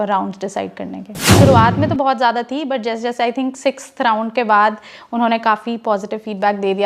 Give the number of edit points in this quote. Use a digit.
1